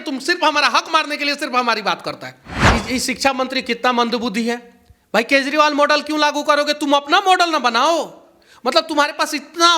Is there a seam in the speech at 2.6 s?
yes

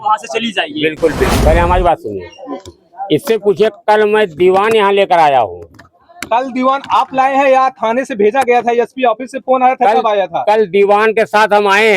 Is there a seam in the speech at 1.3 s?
yes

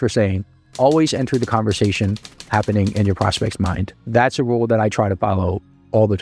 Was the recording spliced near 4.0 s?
yes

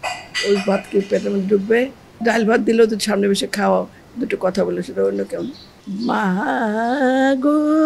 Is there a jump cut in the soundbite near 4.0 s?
no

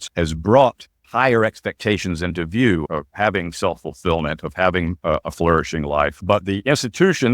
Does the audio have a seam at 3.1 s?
no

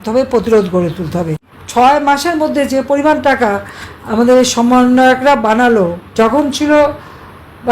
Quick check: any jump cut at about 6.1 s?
yes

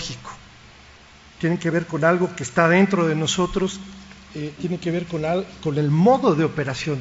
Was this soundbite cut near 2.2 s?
no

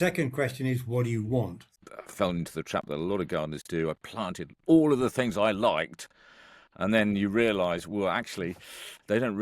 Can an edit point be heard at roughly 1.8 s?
yes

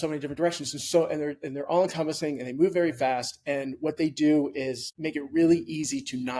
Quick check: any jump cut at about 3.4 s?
no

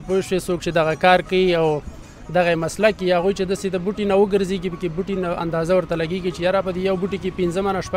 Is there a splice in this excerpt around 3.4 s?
no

